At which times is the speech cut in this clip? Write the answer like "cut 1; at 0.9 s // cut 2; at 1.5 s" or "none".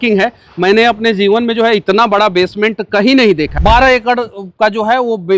cut 1; at 3.5 s

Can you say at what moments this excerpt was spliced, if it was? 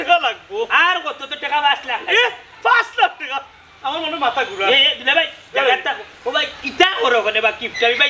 none

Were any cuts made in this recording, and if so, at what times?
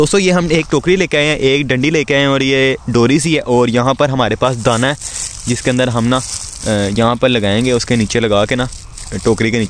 none

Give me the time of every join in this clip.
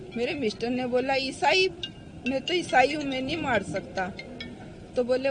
none

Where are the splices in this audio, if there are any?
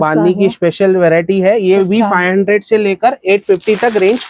none

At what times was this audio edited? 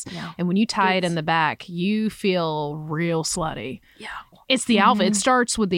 cut 1; at 4.3 s

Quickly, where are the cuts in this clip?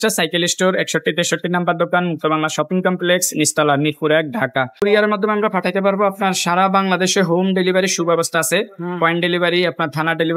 cut 1; at 4.7 s

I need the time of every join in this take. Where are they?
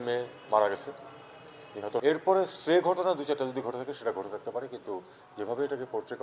cut 1; at 2.0 s

